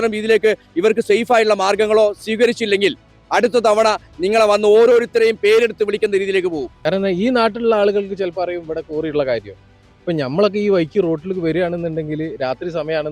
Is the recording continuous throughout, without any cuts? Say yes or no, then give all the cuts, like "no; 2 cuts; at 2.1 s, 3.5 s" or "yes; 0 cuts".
no; 1 cut; at 6.7 s